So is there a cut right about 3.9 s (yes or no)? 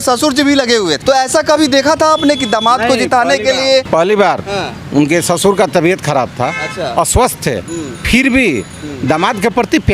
yes